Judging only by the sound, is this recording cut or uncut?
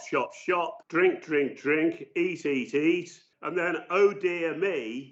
uncut